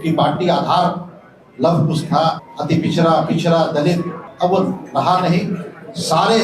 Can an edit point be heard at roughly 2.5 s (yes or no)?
yes